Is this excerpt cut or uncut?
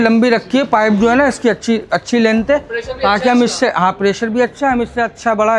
uncut